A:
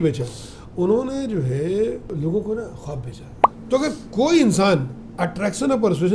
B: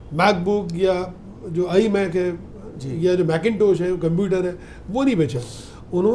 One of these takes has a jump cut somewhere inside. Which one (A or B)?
A